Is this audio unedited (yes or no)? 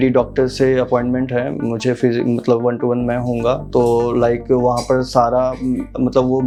yes